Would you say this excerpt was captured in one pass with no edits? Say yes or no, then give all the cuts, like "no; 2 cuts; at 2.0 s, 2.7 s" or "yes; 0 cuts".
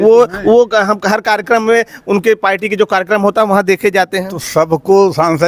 yes; 0 cuts